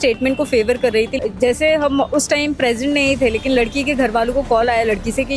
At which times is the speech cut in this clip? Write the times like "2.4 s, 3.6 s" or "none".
1.1 s